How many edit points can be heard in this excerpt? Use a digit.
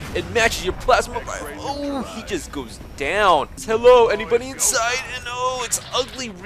1